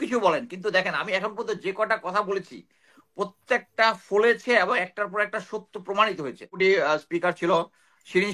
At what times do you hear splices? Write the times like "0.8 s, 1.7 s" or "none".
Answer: 6.6 s

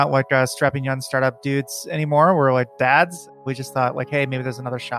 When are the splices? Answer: 3.4 s

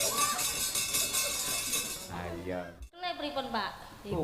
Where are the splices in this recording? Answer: 2.9 s

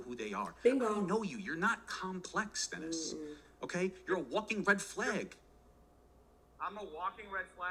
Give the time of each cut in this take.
none

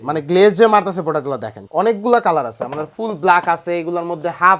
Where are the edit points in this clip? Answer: 1.6 s

